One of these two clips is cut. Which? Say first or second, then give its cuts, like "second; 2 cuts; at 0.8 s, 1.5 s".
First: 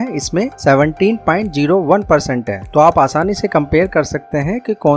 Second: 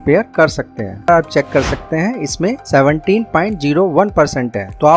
second; 1 cut; at 1.1 s